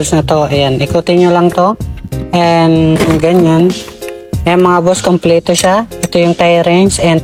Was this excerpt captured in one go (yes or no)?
yes